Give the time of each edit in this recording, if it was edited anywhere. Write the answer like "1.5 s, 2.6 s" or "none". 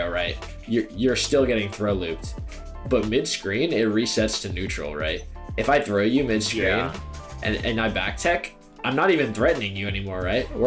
2.8 s, 5.4 s, 8.7 s